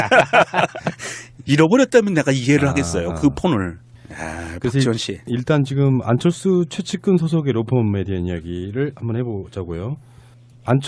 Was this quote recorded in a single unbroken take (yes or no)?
no